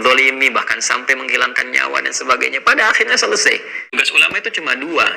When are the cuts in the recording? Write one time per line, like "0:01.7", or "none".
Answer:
0:03.8